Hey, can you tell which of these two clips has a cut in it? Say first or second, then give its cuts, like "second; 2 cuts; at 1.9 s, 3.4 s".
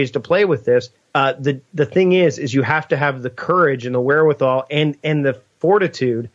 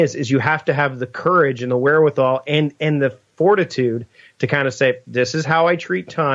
first; 1 cut; at 1.0 s